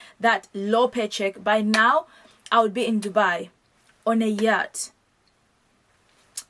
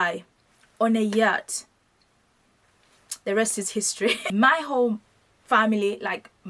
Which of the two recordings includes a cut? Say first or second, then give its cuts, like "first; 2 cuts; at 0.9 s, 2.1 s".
second; 1 cut; at 4.2 s